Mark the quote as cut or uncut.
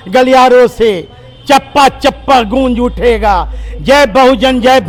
uncut